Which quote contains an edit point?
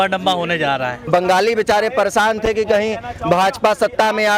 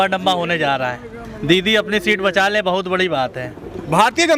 first; 1 cut; at 1.0 s

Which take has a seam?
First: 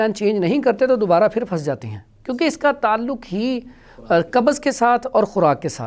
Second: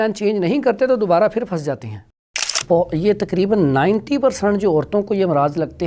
second; 1 cut; at 2.2 s

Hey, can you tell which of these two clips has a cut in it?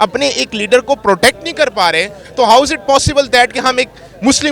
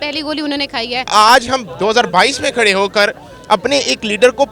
second; 1 cut; at 1.1 s

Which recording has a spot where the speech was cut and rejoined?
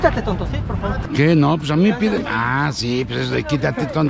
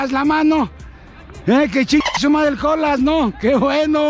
first; 1 cut; at 1.0 s

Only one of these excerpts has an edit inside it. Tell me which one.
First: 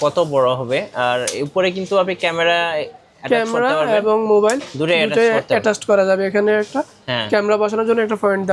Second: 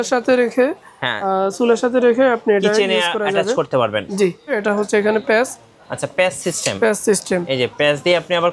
second; 1 cut; at 4.6 s

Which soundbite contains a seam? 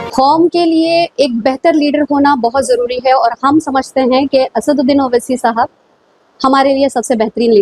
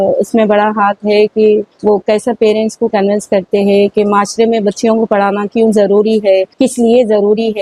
second; 2 cuts; at 1.7 s, 6.5 s

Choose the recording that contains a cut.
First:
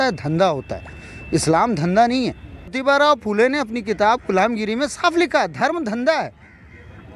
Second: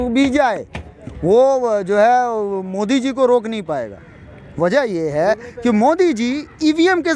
first; 1 cut; at 2.8 s

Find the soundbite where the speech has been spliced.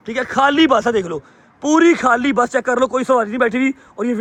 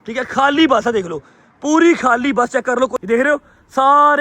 second; 1 cut; at 3.0 s

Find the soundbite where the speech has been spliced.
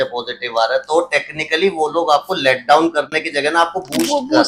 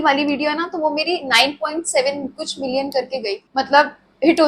second; 1 cut; at 3.4 s

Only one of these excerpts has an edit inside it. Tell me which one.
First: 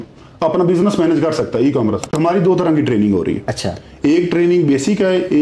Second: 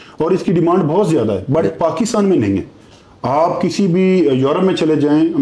first; 1 cut; at 2.1 s

